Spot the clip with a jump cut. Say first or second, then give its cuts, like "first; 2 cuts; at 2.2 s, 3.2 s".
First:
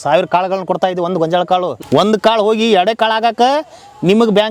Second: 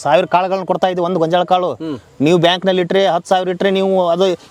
first; 1 cut; at 1.8 s